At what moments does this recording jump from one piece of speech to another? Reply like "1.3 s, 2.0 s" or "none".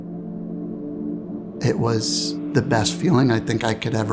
1.6 s